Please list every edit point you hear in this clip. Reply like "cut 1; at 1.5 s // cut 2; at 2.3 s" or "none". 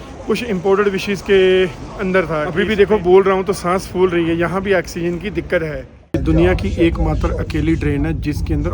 cut 1; at 2.5 s // cut 2; at 6.1 s